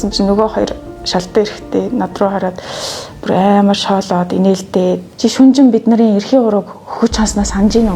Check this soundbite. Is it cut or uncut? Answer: cut